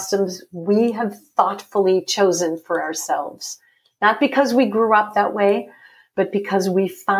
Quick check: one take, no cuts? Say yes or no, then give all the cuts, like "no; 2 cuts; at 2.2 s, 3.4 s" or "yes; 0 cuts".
yes; 0 cuts